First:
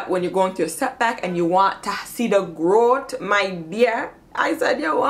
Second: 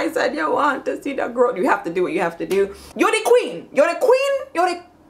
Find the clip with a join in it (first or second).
second